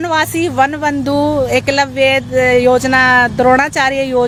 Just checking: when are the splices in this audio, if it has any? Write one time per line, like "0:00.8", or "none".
none